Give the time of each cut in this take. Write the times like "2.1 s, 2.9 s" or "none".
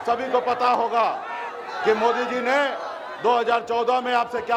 none